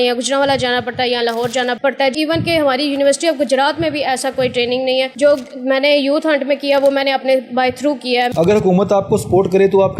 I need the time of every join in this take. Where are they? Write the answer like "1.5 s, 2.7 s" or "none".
2.1 s, 5.1 s, 8.3 s